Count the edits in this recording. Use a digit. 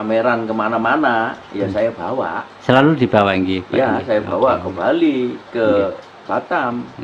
1